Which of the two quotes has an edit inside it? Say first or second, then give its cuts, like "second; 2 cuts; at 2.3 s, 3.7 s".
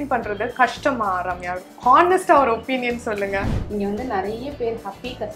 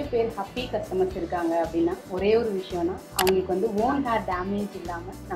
first; 1 cut; at 3.5 s